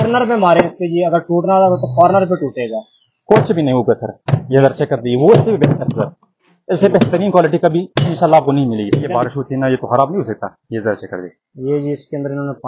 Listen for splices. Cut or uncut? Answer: cut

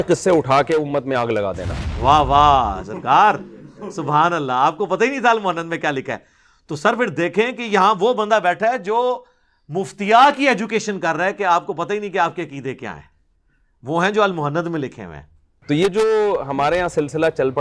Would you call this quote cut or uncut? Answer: cut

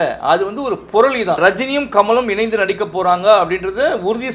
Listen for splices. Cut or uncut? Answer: cut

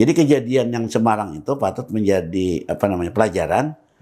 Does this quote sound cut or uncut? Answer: uncut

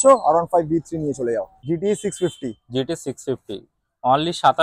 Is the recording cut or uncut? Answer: cut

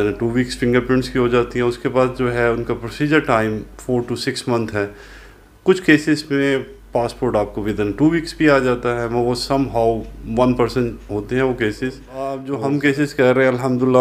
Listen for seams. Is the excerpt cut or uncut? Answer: cut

